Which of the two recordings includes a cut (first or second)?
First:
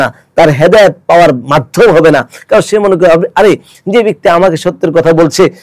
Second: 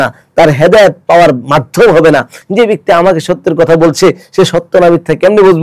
second